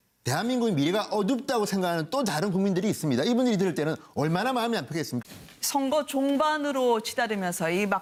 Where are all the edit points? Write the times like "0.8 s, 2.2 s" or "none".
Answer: none